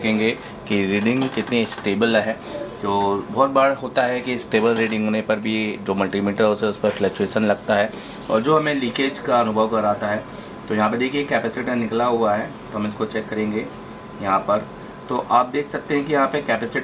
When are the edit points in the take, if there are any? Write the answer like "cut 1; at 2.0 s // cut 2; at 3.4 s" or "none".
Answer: none